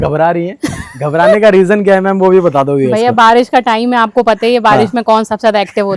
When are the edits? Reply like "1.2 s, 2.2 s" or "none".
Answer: none